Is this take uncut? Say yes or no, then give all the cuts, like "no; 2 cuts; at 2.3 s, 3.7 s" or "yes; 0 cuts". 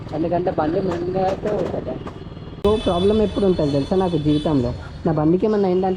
no; 1 cut; at 2.6 s